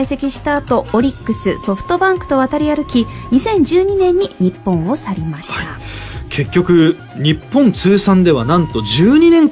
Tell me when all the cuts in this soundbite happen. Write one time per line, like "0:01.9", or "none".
0:02.0